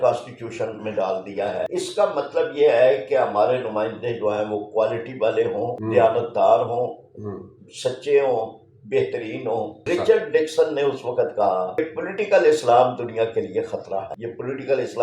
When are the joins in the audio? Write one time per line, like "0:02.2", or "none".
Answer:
0:01.7
0:05.8
0:09.8
0:11.8
0:14.1